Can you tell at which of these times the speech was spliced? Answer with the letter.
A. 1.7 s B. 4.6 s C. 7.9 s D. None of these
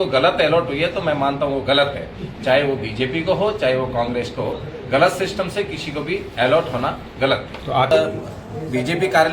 C